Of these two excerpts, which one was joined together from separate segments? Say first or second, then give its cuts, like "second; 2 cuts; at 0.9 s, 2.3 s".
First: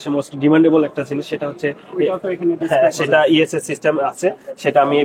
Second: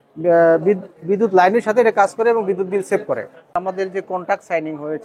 second; 1 cut; at 3.5 s